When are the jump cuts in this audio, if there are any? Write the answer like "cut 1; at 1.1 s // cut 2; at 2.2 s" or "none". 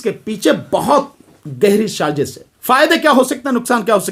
cut 1; at 2.5 s